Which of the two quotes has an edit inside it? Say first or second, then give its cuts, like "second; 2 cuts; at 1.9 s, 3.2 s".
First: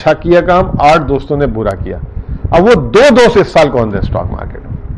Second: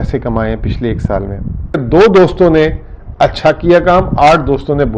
second; 1 cut; at 1.8 s